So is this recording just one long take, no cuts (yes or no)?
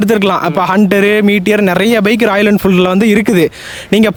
yes